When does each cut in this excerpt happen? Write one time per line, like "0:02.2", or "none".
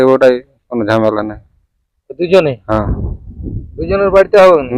none